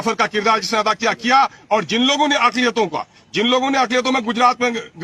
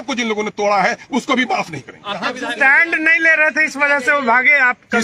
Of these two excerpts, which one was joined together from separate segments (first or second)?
second